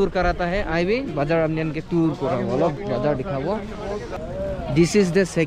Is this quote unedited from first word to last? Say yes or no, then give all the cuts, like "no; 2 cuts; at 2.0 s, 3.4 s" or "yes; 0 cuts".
no; 1 cut; at 4.1 s